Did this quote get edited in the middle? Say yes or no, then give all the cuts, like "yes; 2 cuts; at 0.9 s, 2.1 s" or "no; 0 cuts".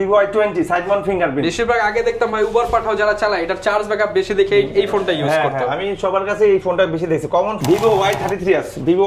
yes; 1 cut; at 7.5 s